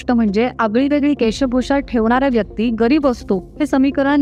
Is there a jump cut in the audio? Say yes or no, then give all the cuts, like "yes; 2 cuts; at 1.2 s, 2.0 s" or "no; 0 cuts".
no; 0 cuts